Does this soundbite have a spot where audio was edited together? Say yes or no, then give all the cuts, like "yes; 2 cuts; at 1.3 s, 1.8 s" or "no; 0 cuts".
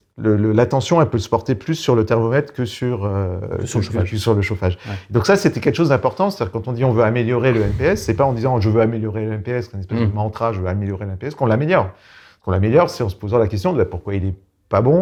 no; 0 cuts